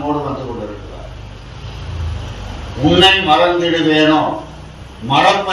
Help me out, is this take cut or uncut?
uncut